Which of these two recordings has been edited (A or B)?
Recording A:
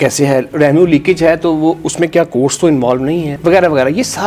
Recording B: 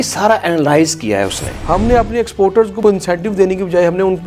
B